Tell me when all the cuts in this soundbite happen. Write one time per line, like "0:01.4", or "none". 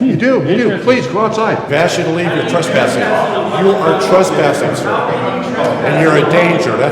0:01.7